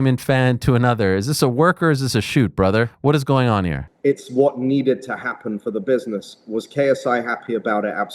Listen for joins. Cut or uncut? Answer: cut